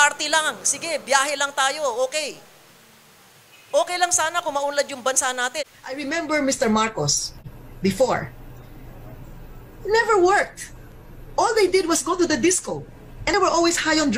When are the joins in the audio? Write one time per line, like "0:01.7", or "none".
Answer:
0:05.6